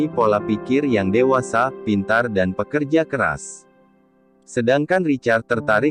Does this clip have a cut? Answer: no; 0 cuts

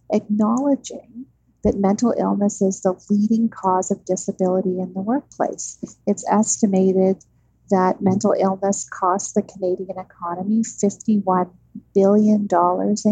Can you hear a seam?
no; 0 cuts

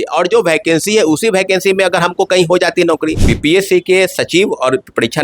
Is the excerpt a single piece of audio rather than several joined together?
no; 1 cut; at 3.3 s

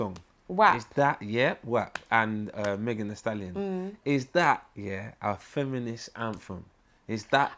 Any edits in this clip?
no; 0 cuts

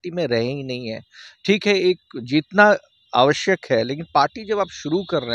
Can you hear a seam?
no; 0 cuts

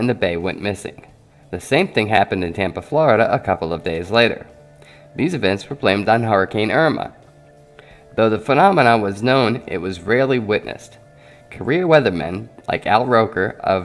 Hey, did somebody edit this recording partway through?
no; 0 cuts

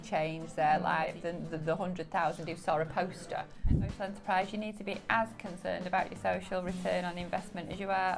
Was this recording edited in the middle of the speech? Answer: yes; 2 cuts; at 1.1 s, 3.9 s

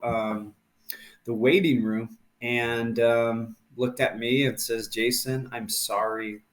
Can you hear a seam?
no; 0 cuts

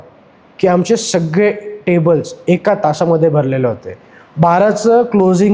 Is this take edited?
no; 0 cuts

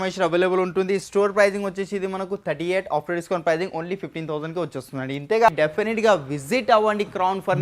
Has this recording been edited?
yes; 1 cut; at 5.5 s

